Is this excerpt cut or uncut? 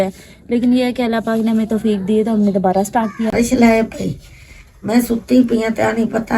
cut